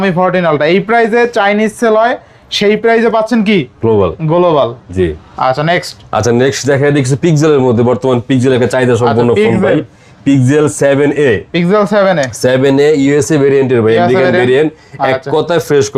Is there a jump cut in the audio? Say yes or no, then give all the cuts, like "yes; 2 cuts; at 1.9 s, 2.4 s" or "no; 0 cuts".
no; 0 cuts